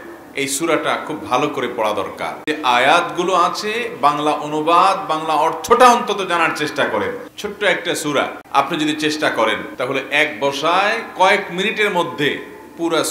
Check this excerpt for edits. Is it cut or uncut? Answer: cut